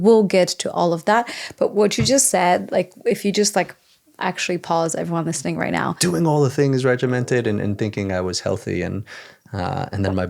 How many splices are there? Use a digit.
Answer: 1